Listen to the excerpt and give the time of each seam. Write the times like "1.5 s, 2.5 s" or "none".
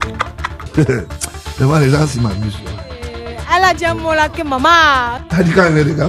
5.2 s